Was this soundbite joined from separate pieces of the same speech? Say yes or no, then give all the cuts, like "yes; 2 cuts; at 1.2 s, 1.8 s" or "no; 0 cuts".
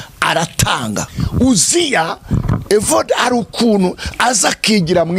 yes; 1 cut; at 1.1 s